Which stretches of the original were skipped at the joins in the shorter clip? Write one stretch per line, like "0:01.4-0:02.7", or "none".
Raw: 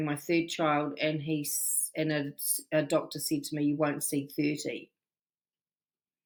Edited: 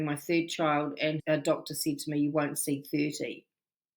0:01.2-0:02.6

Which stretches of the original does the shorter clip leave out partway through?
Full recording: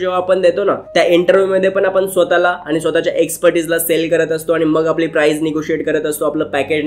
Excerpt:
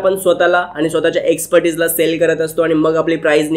none

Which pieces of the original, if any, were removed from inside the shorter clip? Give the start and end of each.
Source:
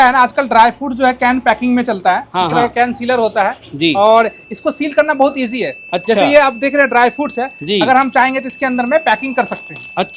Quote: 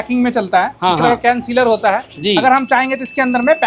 0:03.6-0:07.6

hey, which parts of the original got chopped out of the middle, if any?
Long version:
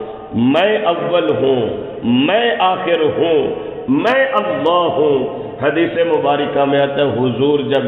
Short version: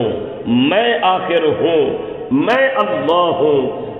none

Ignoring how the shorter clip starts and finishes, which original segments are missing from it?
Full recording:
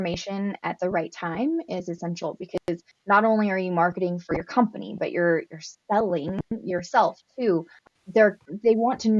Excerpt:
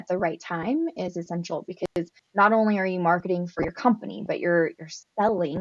none

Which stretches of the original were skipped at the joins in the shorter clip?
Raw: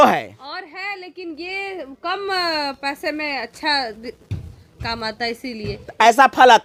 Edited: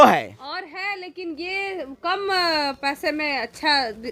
none

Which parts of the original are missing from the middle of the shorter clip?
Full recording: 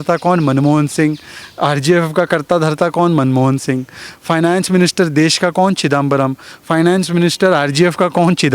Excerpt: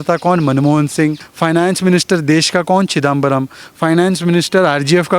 0:01.3-0:04.1

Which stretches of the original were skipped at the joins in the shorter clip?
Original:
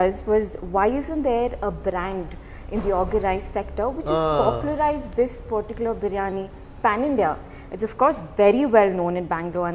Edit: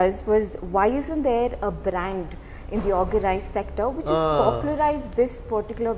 none

